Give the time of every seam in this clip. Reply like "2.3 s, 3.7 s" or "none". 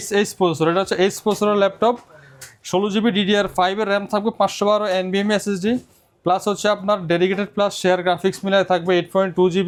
none